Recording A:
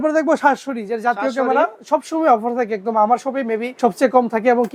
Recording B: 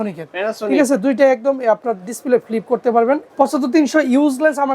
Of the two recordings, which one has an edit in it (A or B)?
B